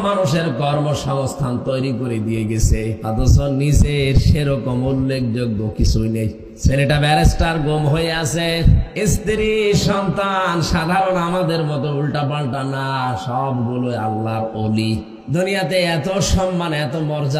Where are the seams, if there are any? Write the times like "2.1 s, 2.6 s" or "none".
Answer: 2.9 s, 6.4 s, 8.9 s, 15.1 s